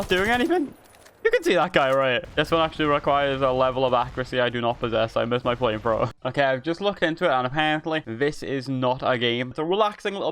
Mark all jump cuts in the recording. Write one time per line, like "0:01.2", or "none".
0:02.3
0:06.1
0:09.5